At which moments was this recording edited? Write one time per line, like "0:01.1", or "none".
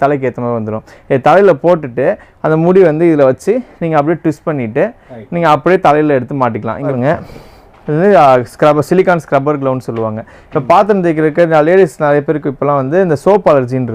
0:06.9